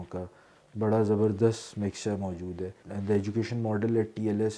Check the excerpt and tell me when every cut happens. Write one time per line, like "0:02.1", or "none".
0:02.8